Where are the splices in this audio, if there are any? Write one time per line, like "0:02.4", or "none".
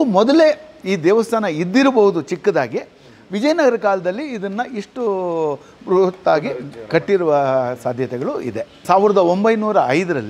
none

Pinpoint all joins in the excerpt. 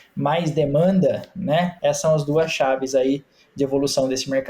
0:01.7

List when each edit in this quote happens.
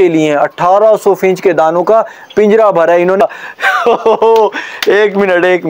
0:03.2

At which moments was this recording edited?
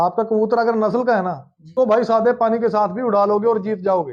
0:01.7

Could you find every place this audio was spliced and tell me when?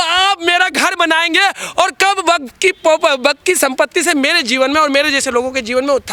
none

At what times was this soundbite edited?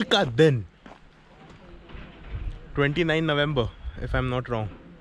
none

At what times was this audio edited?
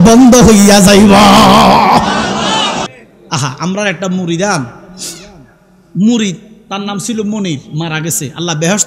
0:02.9

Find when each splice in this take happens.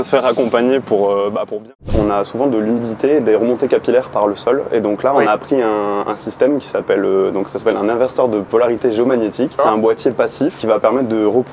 0:01.9
0:08.5
0:09.6
0:10.6

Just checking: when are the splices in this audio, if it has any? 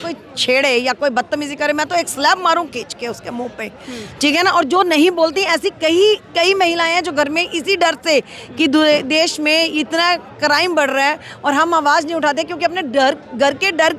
none

